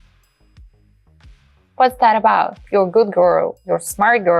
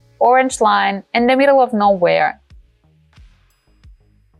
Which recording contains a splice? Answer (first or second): first